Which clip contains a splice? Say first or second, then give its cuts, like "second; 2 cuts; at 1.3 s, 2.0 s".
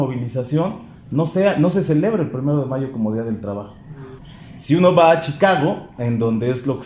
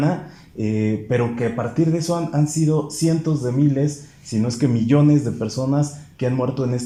first; 1 cut; at 4.0 s